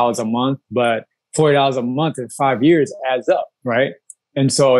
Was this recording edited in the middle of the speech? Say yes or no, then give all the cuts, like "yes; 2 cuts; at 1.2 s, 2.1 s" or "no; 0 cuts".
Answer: no; 0 cuts